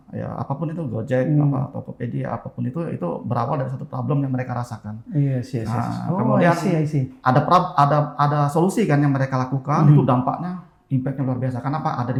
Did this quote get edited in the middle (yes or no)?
no